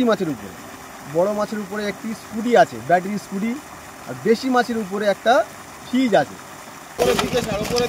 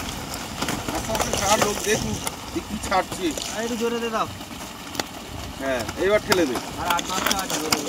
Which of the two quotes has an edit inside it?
first; 1 cut; at 6.9 s

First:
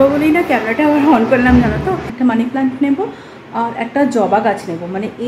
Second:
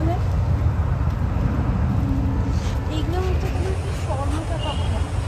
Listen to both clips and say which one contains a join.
first; 1 cut; at 2.1 s

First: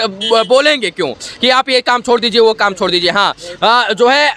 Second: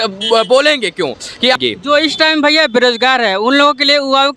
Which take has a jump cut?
second; 1 cut; at 1.6 s

